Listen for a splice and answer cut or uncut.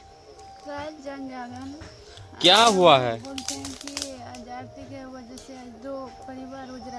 uncut